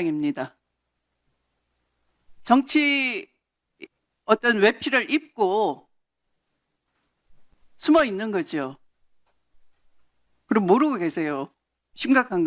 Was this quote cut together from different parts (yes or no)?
no